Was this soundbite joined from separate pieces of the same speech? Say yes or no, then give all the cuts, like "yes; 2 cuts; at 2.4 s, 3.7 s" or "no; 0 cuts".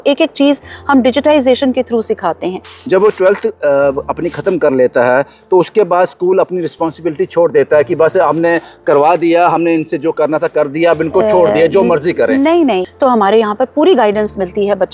yes; 2 cuts; at 2.7 s, 12.9 s